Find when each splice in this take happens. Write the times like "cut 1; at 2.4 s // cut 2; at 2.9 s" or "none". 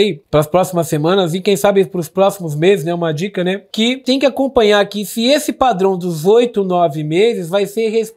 cut 1; at 4.0 s